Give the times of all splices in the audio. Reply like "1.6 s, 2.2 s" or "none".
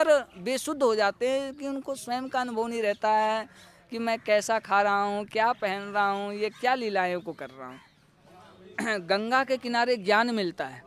8.2 s